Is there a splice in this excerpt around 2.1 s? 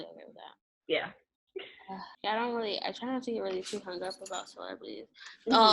yes; 1 cut; at 2.1 s

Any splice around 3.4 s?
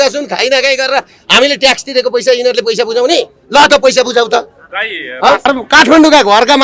no; 1 cut; at 5.5 s

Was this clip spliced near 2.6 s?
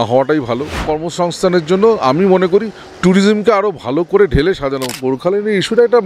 no; 2 cuts; at 0.9 s, 4.9 s

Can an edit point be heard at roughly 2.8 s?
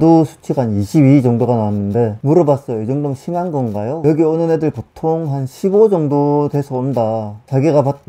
no; 1 cut; at 4.0 s

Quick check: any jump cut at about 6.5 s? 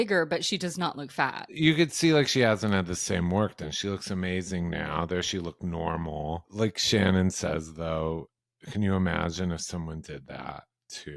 yes; 2 cuts; at 1.5 s, 6.5 s

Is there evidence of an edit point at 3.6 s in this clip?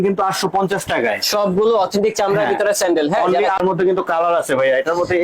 yes; 1 cut; at 3.6 s

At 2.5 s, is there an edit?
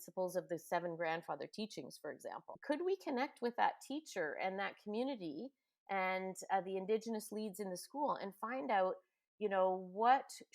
yes; 1 cut; at 2.5 s

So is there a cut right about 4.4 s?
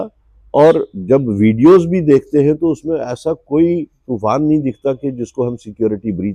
no; 0 cuts

